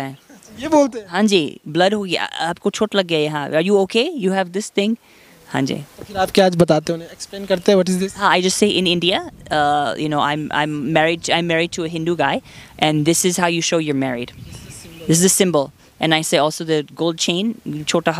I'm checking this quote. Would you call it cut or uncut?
uncut